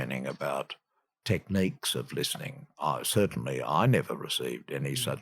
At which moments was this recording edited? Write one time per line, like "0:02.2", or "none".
0:01.2